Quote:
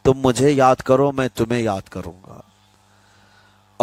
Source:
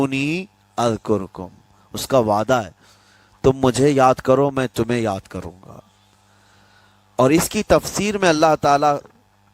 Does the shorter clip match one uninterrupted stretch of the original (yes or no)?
yes